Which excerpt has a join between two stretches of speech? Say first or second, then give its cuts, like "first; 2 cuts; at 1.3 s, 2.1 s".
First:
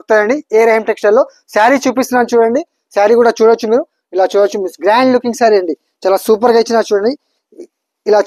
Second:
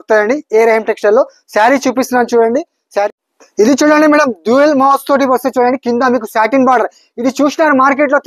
second; 1 cut; at 3.1 s